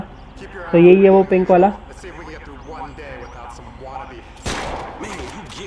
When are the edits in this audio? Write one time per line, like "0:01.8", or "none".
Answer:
none